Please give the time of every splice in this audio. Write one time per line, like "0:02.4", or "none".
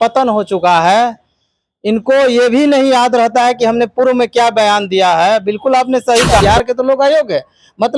0:06.4